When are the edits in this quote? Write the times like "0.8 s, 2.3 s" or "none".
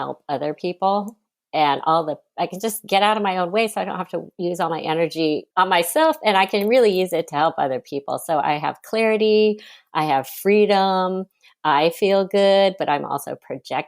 4.2 s, 5.5 s